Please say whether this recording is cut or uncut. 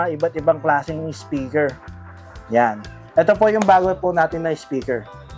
uncut